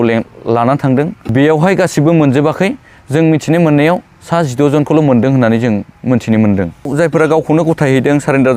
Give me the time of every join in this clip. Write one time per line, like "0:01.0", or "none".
0:01.3
0:06.9